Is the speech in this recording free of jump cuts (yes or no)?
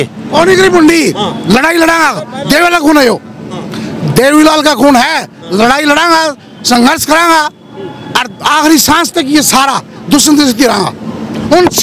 yes